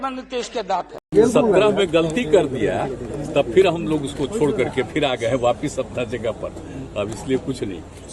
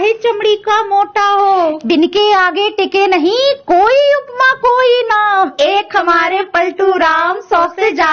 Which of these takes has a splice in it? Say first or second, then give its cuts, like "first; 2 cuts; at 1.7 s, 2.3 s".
first; 1 cut; at 1.0 s